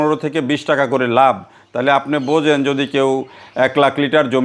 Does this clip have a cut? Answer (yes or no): no